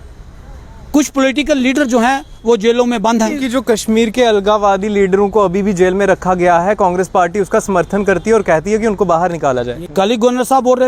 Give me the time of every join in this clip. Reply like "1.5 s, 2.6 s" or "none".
3.4 s, 9.8 s